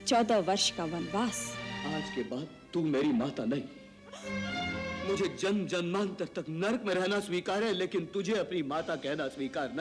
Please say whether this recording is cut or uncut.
cut